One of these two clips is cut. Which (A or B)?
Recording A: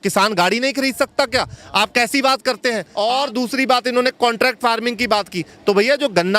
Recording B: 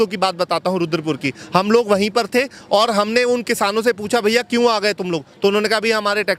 A